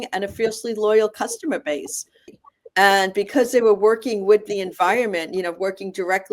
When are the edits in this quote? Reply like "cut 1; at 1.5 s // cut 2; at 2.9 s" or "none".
cut 1; at 2.3 s